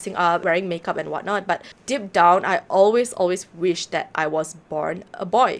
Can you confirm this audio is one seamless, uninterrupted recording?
yes; 0 cuts

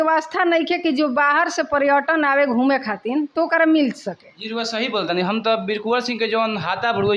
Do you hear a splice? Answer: no; 0 cuts

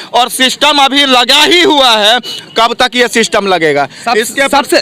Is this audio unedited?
yes; 0 cuts

